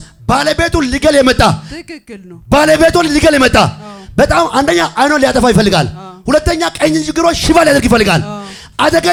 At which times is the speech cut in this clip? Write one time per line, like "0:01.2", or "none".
none